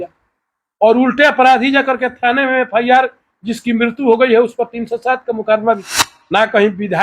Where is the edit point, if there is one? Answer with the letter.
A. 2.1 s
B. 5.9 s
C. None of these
B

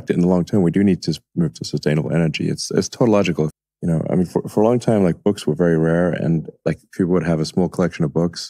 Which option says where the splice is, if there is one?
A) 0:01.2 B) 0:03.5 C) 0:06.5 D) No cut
B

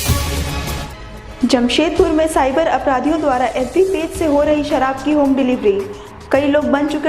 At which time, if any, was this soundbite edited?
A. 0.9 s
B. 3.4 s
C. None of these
A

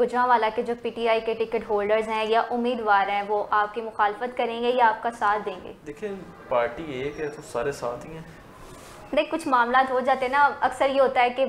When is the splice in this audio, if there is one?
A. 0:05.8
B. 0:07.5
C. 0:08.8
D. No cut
D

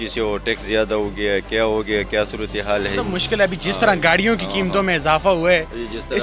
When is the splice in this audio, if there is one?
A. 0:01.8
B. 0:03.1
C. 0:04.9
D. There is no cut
D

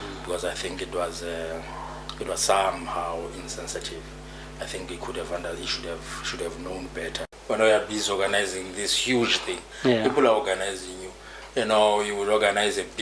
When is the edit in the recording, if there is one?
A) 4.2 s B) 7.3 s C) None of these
B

